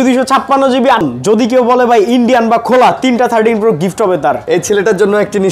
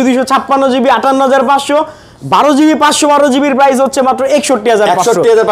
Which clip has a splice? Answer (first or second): first